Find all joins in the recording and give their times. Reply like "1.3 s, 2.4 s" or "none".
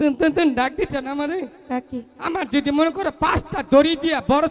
none

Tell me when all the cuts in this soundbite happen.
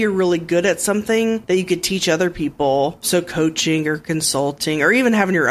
none

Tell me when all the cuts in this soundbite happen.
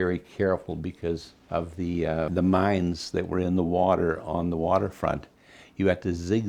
1.3 s, 2.3 s

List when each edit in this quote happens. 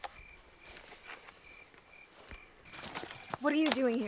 3.0 s

